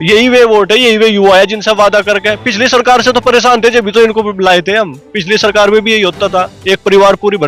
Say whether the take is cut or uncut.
uncut